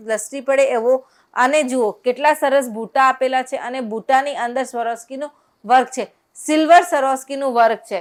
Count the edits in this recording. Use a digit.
0